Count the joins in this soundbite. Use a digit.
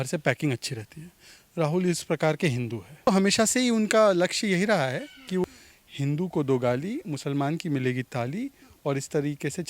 2